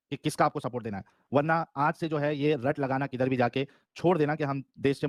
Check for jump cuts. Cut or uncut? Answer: uncut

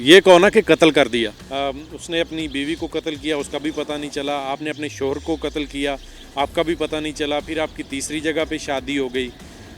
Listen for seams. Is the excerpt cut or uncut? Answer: cut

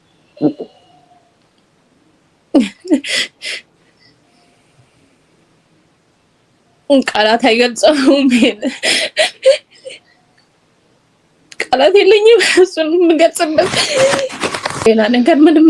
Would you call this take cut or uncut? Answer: uncut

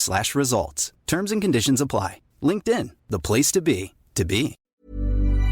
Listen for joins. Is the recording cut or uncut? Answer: cut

